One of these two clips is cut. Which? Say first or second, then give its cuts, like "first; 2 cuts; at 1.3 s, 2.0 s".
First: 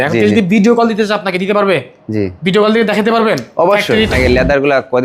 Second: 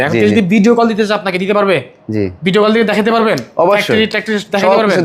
first; 1 cut; at 4.1 s